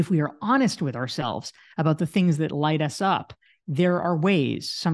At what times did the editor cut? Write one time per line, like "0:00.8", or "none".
none